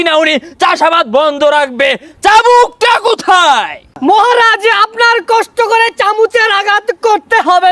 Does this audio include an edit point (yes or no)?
yes